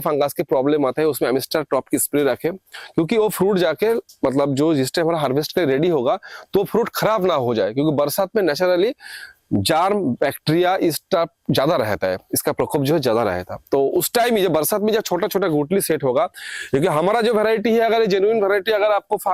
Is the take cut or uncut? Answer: uncut